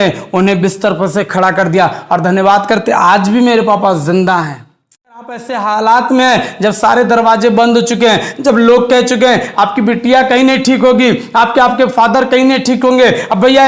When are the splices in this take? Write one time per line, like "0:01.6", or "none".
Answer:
0:05.2